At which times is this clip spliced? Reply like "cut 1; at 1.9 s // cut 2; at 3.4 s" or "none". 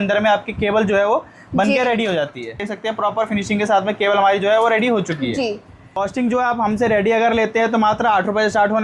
cut 1; at 2.6 s // cut 2; at 6.0 s